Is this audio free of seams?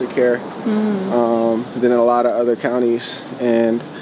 yes; 0 cuts

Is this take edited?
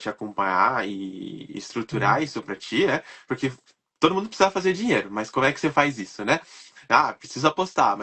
no; 0 cuts

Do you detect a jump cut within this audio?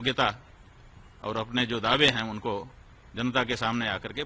no; 0 cuts

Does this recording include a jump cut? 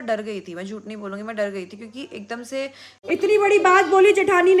yes; 1 cut; at 3.0 s

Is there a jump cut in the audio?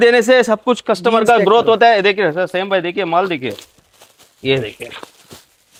no; 0 cuts

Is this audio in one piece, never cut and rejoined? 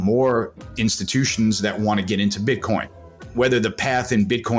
no; 1 cut; at 3.3 s

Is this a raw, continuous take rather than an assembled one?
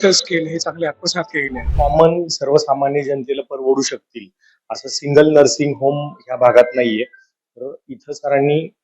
no; 1 cut; at 1.7 s

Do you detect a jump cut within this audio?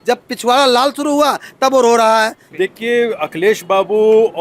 yes; 1 cut; at 2.4 s

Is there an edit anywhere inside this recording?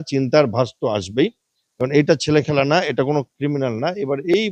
no; 0 cuts

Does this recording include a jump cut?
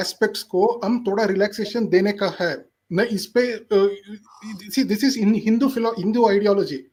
no; 0 cuts

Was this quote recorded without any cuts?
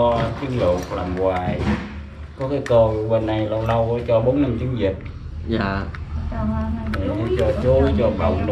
yes; 0 cuts

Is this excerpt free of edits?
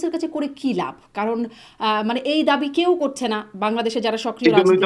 yes; 0 cuts

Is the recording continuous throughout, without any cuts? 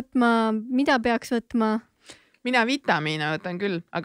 yes; 0 cuts

